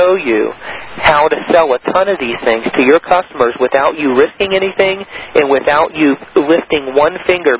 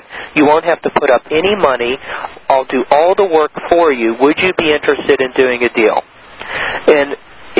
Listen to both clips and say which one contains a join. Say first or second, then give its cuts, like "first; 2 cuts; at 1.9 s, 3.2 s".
second; 1 cut; at 2.4 s